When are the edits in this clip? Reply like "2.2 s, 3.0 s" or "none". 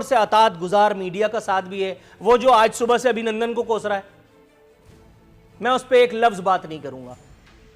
none